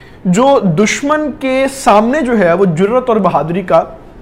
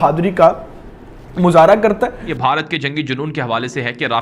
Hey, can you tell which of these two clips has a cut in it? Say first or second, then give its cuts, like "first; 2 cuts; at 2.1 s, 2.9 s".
second; 1 cut; at 2.2 s